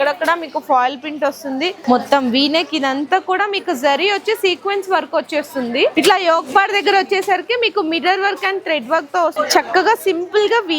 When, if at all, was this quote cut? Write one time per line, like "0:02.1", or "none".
0:01.8
0:05.9
0:09.4